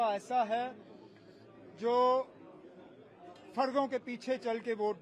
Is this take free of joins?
yes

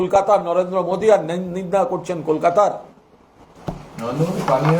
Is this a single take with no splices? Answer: yes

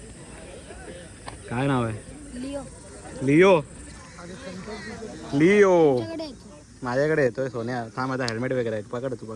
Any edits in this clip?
no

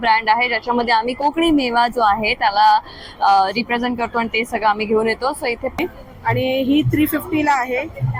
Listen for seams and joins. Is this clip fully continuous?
no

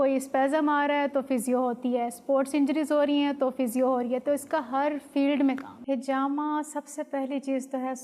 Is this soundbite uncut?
no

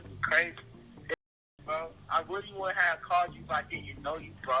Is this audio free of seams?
yes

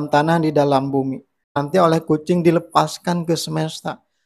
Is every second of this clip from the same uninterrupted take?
no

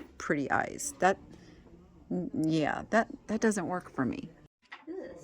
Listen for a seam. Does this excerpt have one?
yes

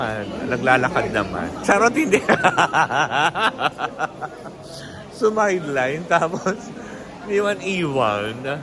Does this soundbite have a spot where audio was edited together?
no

